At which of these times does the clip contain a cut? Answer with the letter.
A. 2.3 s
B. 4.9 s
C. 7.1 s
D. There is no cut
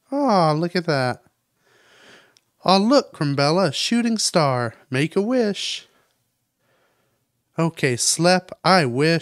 D